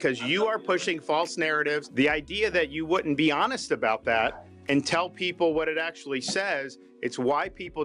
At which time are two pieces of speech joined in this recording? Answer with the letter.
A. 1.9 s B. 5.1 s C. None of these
A